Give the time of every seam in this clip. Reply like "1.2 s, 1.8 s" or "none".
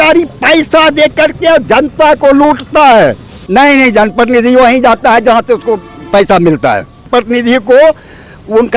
3.4 s, 7.1 s